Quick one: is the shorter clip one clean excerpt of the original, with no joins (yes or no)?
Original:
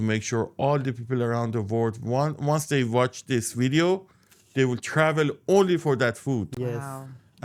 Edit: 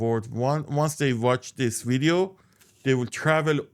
yes